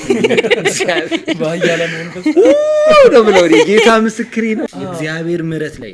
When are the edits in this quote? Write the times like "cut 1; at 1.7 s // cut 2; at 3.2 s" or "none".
cut 1; at 4.6 s